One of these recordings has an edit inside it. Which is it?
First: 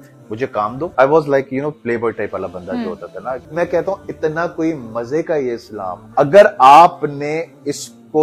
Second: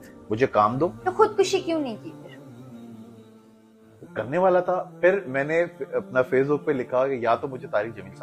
first; 3 cuts; at 0.8 s, 3.5 s, 6.0 s

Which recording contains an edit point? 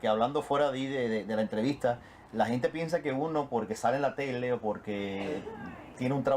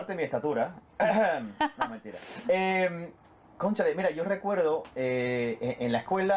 first; 1 cut; at 3.4 s

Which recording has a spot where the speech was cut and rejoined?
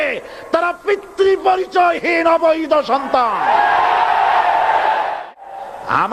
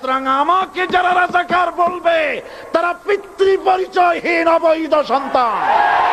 first; 1 cut; at 5.2 s

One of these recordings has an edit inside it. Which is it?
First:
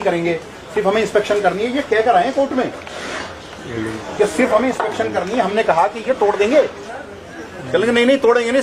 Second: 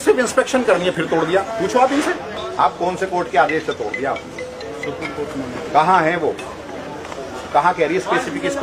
second; 1 cut; at 2.4 s

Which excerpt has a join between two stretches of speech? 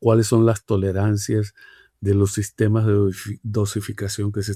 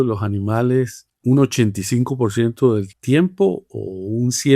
second; 2 cuts; at 1.0 s, 2.9 s

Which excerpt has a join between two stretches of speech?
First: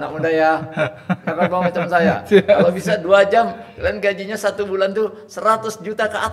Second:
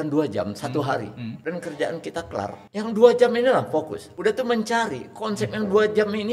second; 3 cuts; at 1.3 s, 2.6 s, 4.0 s

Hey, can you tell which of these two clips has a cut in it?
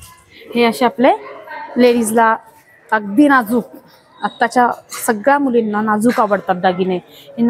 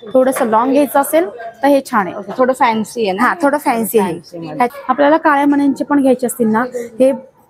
second; 1 cut; at 4.7 s

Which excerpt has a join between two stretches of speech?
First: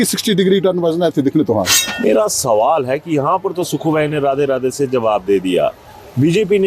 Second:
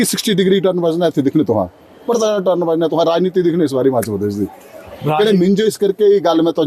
first; 1 cut; at 1.8 s

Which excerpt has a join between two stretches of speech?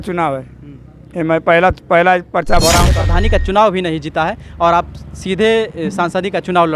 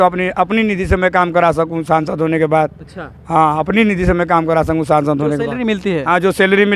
first; 1 cut; at 2.9 s

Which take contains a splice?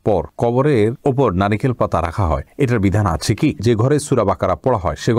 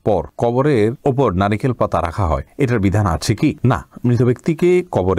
first; 1 cut; at 3.6 s

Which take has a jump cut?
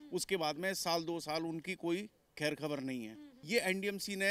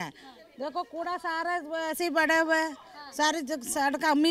first; 1 cut; at 3.4 s

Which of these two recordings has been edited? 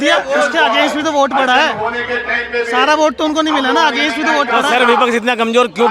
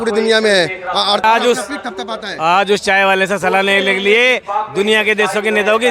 second; 1 cut; at 1.2 s

